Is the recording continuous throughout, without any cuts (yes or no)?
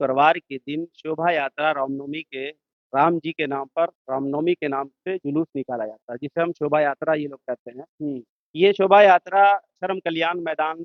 yes